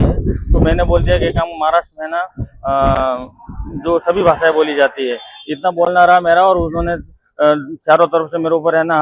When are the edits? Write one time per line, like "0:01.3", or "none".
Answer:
none